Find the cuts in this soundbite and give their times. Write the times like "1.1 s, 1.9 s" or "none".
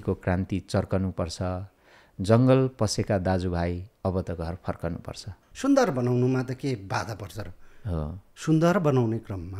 5.4 s